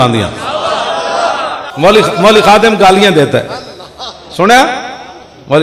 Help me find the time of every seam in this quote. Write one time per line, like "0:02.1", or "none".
0:01.6